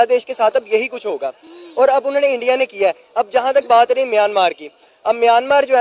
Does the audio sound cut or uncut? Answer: uncut